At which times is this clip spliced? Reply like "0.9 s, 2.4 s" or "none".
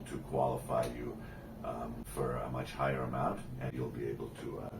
2.0 s, 3.7 s